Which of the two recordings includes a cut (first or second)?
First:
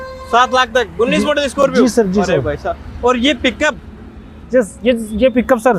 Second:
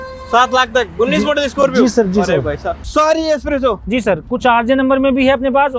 second